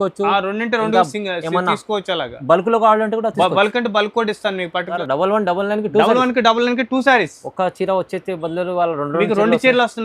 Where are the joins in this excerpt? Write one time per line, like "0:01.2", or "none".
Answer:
0:04.9